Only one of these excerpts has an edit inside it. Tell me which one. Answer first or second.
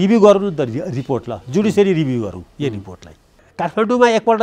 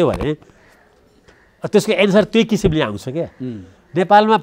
first